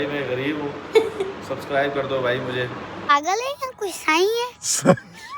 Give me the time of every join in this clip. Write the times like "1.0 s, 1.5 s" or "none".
2.9 s